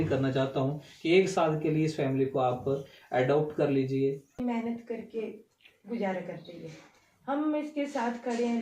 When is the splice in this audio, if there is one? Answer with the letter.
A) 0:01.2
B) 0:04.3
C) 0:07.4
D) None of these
B